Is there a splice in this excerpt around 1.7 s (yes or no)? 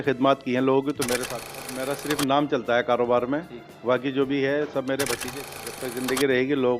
yes